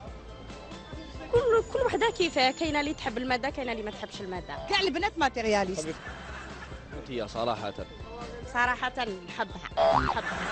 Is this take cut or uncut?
cut